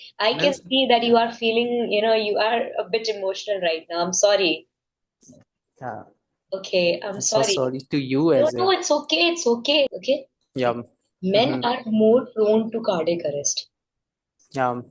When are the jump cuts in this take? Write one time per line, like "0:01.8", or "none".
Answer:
0:09.9